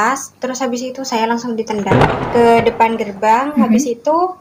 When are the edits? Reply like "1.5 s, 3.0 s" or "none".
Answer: 1.9 s

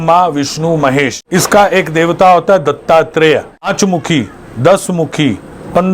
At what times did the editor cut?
1.2 s, 3.7 s

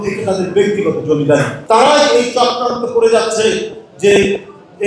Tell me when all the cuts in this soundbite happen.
1.5 s

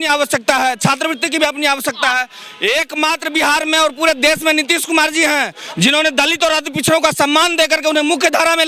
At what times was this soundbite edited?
none

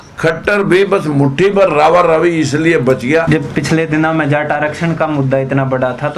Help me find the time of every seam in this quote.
3.3 s

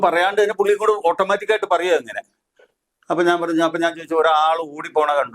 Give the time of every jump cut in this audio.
none

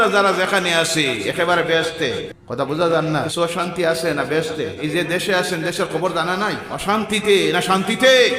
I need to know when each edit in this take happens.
2.4 s, 3.3 s, 4.8 s, 6.7 s

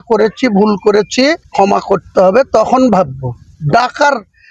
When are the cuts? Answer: 1.4 s

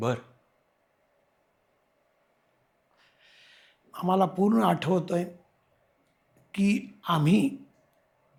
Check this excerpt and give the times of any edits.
none

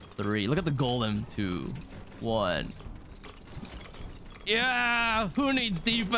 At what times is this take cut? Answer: none

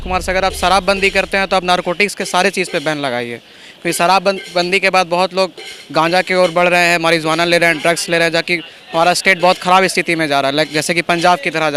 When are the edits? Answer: none

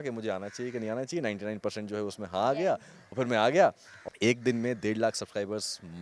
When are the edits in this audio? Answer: 3.0 s, 4.1 s

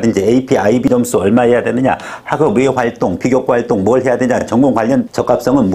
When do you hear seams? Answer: none

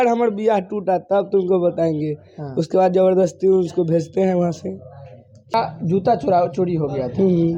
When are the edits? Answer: 5.5 s

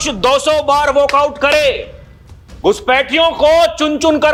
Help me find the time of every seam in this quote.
none

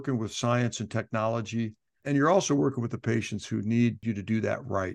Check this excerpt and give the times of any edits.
2.0 s, 4.0 s

